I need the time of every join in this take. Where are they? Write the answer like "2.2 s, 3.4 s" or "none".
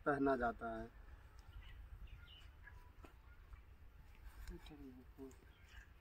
none